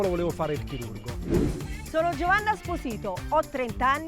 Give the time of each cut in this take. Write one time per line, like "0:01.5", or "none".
0:01.3